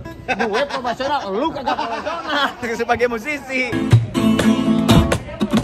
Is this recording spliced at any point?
yes; 1 cut; at 3.7 s

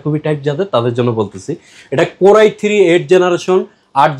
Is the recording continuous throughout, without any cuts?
yes; 0 cuts

